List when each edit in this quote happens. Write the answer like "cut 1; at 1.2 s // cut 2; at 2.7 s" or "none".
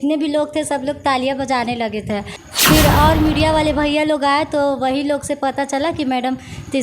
cut 1; at 2.4 s